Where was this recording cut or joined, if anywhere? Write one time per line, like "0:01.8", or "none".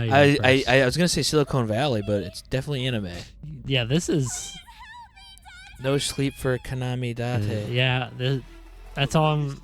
none